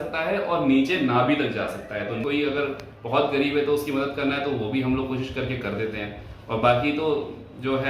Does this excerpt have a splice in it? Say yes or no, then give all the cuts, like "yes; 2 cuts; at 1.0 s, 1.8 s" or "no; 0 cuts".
yes; 1 cut; at 2.2 s